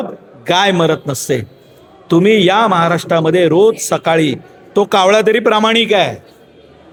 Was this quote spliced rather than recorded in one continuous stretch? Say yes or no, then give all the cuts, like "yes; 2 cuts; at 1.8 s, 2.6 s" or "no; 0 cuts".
no; 0 cuts